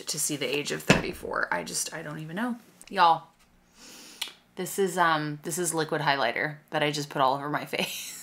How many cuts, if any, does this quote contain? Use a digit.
1